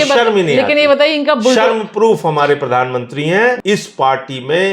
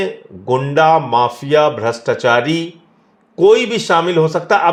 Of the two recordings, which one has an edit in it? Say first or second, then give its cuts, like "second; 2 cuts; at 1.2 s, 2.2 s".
first; 1 cut; at 3.6 s